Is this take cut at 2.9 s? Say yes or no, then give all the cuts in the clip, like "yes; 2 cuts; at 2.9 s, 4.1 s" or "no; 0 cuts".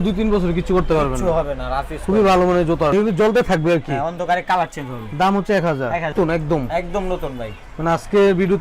yes; 2 cuts; at 2.9 s, 6.1 s